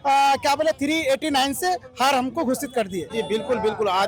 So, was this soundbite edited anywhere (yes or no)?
yes